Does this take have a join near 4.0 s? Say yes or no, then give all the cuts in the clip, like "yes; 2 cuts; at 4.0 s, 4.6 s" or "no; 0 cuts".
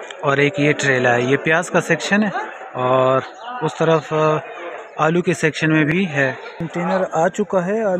no; 1 cut; at 6.7 s